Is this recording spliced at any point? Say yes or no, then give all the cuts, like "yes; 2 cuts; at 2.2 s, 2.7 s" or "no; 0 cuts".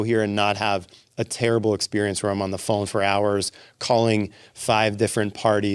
no; 0 cuts